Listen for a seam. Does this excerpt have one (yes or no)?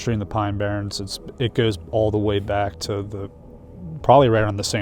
no